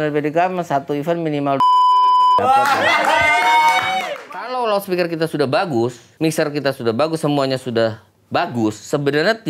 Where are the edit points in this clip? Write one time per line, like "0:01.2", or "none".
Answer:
0:04.1